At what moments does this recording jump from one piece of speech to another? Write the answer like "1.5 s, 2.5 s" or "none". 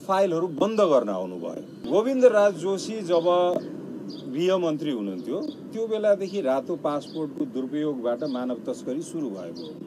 1.8 s